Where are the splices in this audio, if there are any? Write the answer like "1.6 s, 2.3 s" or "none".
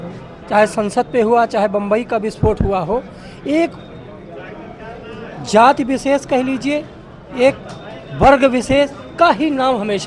none